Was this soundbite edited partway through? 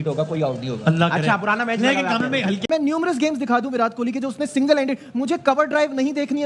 yes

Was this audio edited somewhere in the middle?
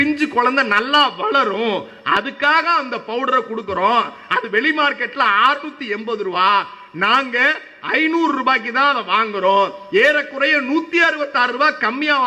no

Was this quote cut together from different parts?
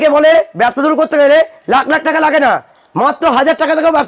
no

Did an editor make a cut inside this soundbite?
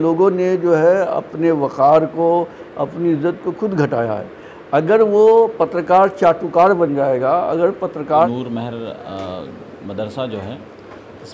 yes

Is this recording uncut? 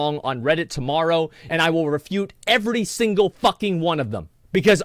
no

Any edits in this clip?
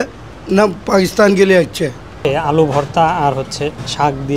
yes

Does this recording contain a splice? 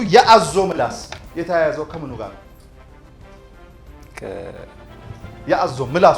yes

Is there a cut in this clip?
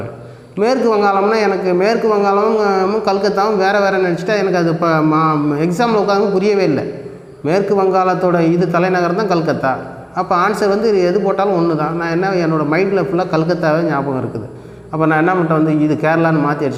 no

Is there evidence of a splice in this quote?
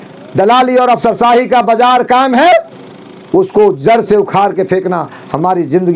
no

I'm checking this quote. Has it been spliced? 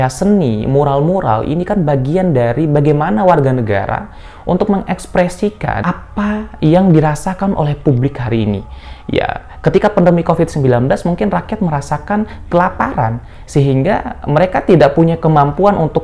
yes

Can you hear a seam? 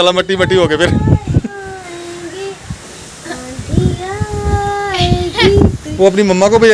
yes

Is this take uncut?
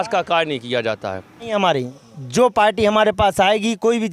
no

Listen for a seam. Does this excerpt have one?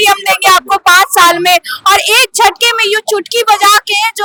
no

